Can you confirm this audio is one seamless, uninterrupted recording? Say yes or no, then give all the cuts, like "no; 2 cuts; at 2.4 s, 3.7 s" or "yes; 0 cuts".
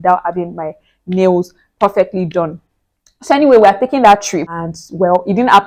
yes; 0 cuts